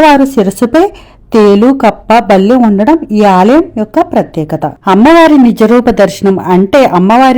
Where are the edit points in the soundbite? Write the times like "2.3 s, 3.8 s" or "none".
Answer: 4.7 s